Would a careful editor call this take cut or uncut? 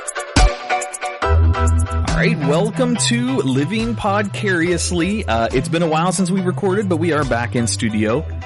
uncut